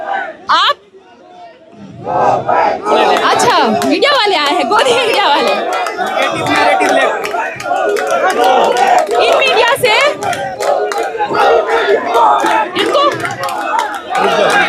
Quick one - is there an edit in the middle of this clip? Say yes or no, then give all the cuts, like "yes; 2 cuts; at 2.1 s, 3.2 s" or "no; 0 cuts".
no; 0 cuts